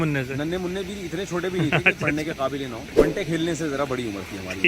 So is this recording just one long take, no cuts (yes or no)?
no